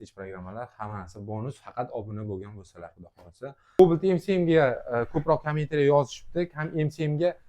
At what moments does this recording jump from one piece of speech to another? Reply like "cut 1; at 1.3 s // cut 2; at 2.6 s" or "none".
cut 1; at 3.8 s